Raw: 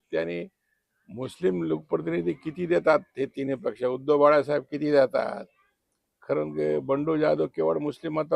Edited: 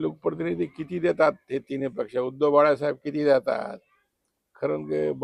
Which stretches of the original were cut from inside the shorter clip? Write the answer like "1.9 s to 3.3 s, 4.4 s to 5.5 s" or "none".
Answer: none